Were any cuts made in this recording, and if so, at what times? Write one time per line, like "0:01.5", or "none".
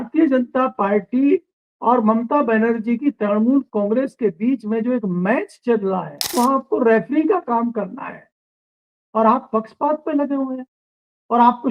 0:06.2